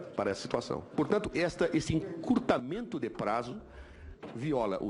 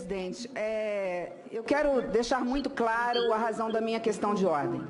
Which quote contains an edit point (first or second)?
first